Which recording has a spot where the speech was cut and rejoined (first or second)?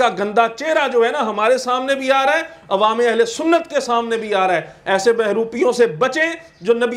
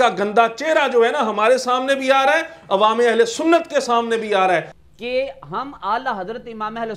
second